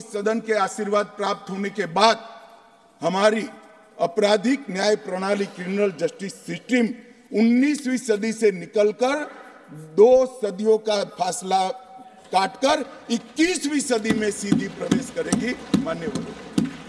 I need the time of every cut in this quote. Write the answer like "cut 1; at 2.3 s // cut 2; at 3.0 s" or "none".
none